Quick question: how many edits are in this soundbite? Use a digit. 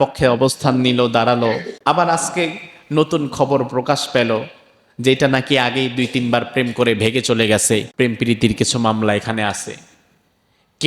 2